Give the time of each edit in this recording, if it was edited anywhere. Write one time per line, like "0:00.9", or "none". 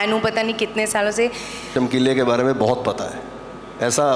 0:01.6